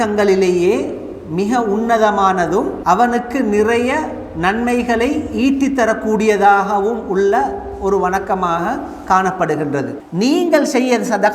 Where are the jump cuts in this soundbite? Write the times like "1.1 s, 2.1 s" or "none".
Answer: 2.7 s, 10.0 s